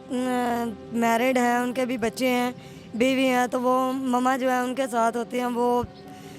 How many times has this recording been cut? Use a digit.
0